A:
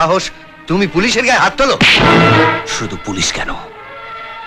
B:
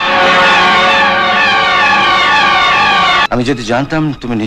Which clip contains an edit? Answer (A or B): B